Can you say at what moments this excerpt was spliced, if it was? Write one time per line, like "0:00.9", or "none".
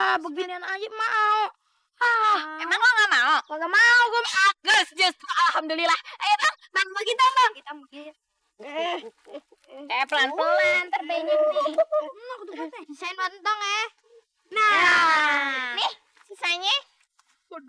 none